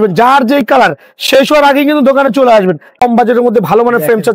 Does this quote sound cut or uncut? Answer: cut